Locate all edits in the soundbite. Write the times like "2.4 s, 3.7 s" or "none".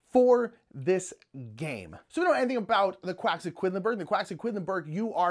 1.9 s